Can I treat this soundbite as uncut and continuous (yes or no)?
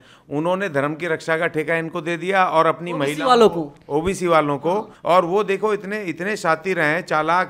no